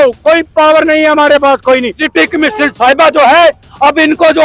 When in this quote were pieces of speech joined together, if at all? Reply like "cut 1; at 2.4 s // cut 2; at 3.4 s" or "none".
cut 1; at 2.0 s